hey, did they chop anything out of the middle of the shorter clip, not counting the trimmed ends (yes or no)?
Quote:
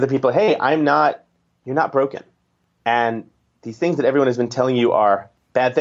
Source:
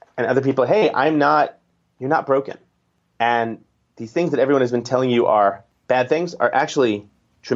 no